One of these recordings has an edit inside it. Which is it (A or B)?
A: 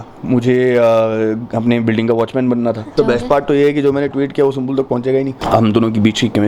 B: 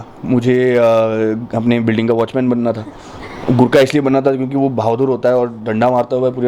A